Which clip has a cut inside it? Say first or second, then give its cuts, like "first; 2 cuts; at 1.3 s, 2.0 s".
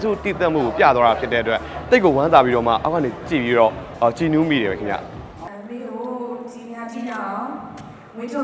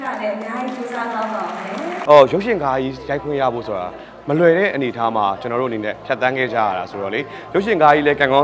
second; 1 cut; at 1.9 s